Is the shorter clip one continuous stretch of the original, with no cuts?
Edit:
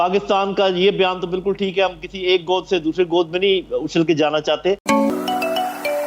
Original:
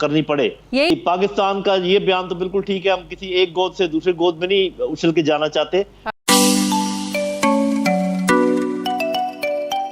no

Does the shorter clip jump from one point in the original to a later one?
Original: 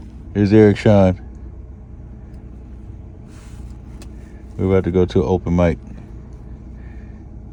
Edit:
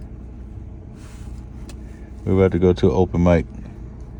no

